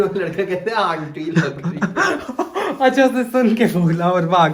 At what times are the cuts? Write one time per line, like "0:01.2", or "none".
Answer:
none